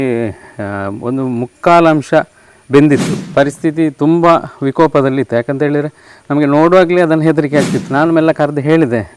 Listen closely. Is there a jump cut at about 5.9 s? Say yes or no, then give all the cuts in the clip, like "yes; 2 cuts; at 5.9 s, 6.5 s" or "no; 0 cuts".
no; 2 cuts; at 3.2 s, 7.8 s